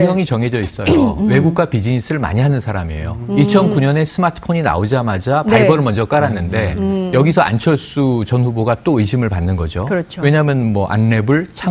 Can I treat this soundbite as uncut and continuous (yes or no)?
yes